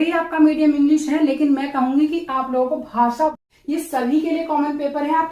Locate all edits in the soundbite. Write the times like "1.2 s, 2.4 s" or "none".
3.4 s